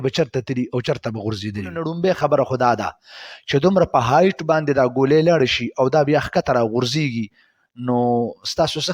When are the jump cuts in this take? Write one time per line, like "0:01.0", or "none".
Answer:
0:01.9